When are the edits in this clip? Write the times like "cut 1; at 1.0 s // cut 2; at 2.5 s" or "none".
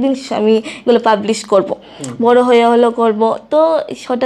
none